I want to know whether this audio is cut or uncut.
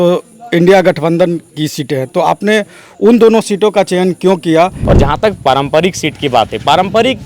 cut